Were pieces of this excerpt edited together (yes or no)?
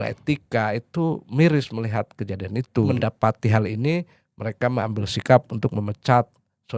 yes